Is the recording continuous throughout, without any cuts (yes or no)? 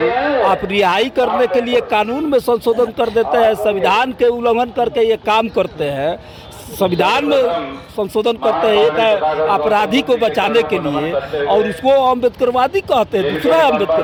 yes